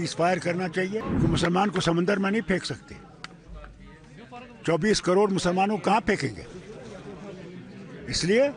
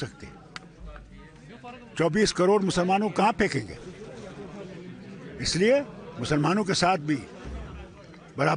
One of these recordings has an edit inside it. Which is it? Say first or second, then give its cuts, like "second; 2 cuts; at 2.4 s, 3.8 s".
first; 1 cut; at 1.1 s